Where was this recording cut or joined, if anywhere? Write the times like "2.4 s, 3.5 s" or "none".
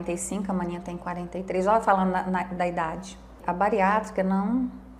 3.4 s